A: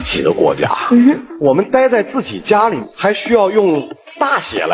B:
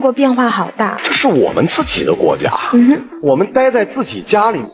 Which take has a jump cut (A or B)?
B